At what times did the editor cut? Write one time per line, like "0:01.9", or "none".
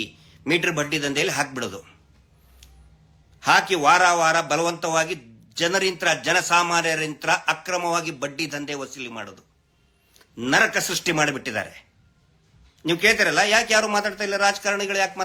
none